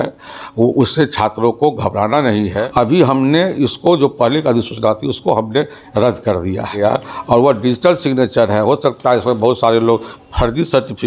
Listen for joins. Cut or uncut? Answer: cut